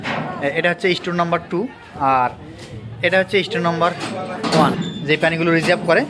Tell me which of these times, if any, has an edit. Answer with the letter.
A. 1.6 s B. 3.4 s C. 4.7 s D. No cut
C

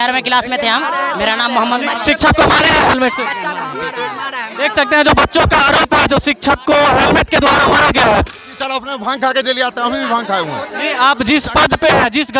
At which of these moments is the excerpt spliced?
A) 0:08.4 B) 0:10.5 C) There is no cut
A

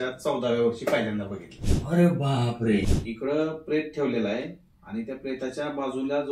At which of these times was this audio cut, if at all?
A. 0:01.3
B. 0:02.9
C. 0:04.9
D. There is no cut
B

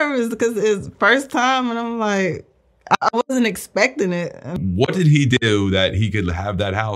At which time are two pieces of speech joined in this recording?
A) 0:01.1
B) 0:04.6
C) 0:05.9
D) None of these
B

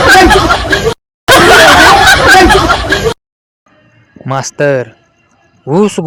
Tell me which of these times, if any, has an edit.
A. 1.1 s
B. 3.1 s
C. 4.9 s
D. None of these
D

